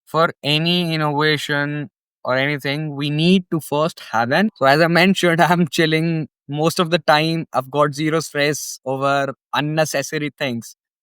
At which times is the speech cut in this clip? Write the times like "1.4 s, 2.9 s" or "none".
4.5 s